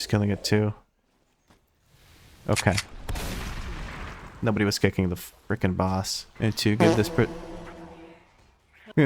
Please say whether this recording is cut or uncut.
cut